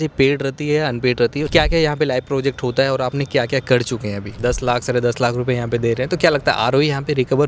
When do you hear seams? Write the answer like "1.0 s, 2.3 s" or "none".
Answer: 1.5 s, 4.3 s